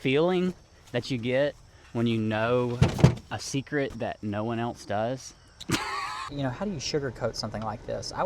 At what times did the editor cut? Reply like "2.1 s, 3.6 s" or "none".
6.3 s